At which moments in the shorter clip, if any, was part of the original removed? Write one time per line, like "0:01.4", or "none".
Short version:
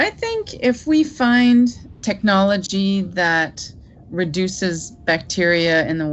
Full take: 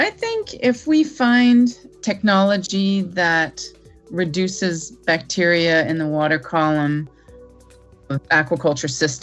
none